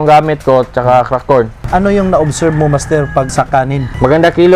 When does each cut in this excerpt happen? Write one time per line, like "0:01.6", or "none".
0:01.6
0:03.6